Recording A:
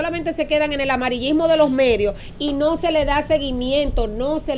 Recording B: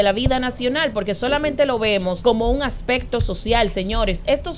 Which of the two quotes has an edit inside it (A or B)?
B